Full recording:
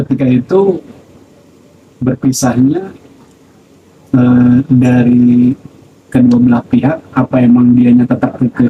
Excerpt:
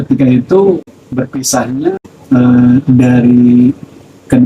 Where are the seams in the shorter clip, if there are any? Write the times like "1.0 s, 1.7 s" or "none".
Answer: 1.0 s, 2.1 s